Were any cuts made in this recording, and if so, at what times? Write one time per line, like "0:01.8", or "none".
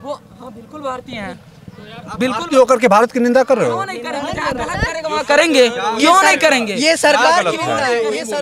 none